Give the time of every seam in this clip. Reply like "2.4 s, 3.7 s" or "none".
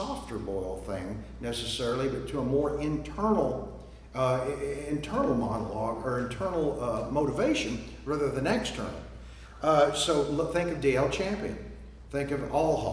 none